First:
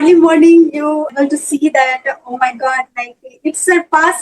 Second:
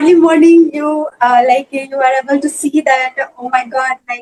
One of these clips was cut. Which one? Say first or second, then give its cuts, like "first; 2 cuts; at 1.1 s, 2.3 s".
first; 1 cut; at 1.1 s